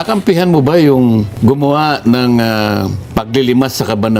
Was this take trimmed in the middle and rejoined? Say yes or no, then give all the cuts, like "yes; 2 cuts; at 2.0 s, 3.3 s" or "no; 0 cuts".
yes; 2 cuts; at 1.3 s, 3.0 s